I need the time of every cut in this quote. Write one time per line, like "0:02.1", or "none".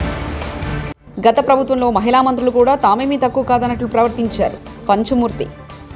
0:00.9